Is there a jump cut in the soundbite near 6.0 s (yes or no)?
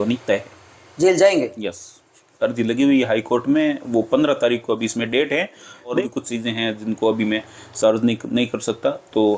yes